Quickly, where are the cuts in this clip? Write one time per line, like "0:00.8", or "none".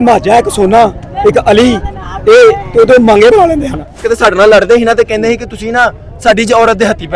0:03.9